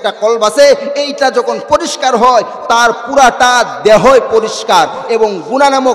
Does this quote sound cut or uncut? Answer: uncut